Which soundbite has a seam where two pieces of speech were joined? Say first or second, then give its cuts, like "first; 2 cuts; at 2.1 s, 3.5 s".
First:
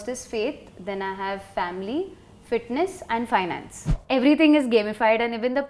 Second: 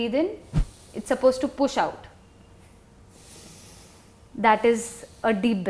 first; 1 cut; at 4.0 s